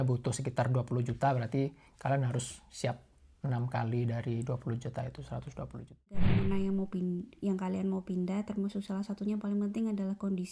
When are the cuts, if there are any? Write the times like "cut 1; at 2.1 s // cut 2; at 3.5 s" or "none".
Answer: cut 1; at 6.2 s